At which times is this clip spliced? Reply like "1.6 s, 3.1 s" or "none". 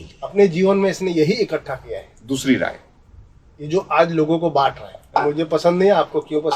5.2 s